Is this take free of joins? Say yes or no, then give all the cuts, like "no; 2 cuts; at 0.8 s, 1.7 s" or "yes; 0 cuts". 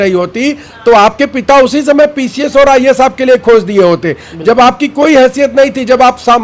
yes; 0 cuts